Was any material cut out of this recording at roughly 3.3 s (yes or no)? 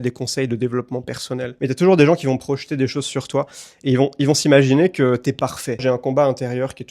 no